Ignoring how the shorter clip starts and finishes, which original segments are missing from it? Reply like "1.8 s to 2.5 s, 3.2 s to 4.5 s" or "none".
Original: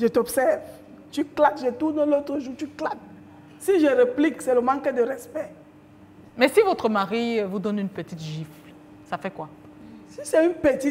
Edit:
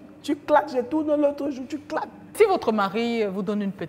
3.2 s to 6.5 s